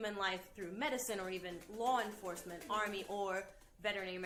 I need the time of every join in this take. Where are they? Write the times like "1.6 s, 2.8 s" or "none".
none